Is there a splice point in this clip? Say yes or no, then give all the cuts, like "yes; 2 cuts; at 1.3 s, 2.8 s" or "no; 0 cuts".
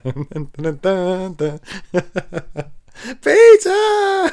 no; 0 cuts